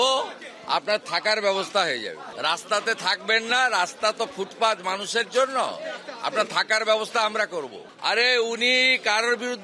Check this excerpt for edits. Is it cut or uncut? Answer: cut